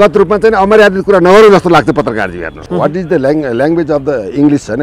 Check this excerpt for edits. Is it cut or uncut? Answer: cut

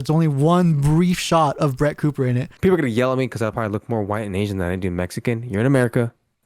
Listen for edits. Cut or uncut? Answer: cut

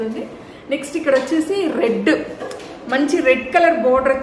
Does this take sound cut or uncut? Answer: uncut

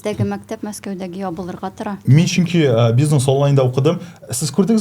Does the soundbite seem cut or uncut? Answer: uncut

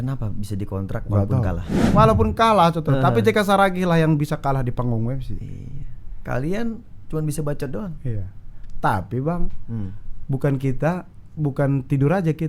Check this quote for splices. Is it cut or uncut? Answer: cut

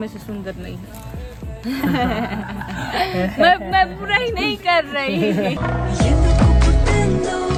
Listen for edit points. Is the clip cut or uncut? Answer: uncut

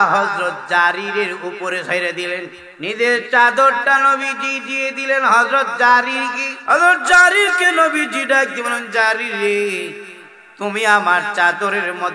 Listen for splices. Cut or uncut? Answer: cut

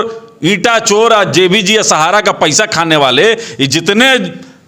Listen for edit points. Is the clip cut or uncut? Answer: uncut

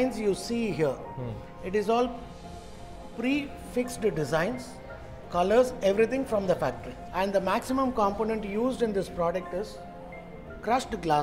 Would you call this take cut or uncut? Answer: cut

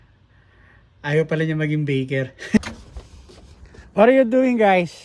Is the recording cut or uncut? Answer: cut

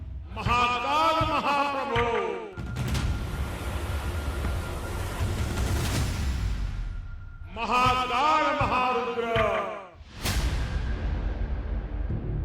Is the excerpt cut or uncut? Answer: cut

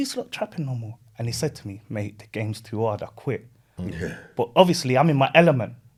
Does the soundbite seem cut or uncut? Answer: uncut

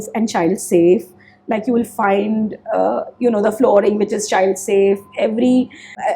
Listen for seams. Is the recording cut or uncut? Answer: uncut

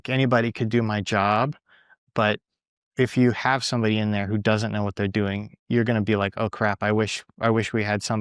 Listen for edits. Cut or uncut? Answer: uncut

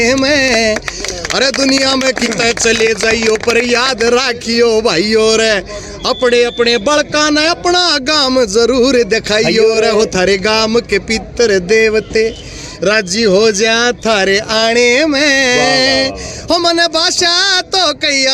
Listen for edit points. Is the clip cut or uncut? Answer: uncut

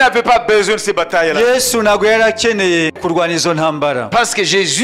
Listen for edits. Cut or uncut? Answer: uncut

